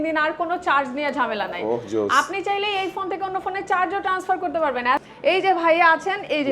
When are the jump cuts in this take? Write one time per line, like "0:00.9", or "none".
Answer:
0:05.0